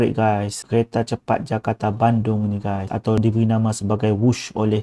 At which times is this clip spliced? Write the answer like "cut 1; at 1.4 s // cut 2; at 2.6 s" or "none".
none